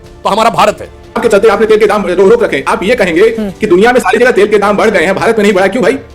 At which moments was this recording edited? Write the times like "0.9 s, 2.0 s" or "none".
1.2 s